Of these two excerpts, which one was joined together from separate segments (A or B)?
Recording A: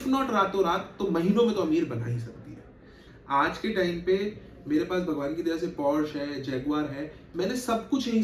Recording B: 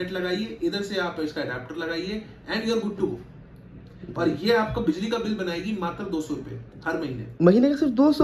A